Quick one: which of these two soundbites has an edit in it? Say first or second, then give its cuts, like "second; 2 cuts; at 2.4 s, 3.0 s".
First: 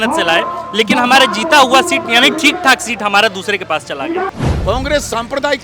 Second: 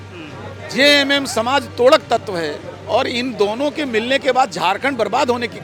first; 1 cut; at 4.3 s